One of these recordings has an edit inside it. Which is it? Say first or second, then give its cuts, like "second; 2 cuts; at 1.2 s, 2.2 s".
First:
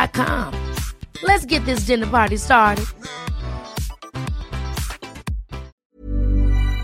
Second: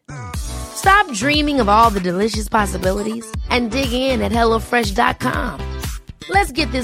first; 1 cut; at 5.8 s